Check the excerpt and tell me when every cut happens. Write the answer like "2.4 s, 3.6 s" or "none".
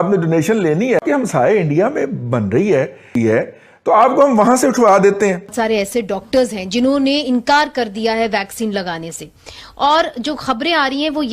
1.0 s, 3.1 s, 5.5 s